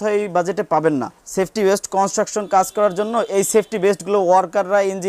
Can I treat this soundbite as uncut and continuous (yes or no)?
no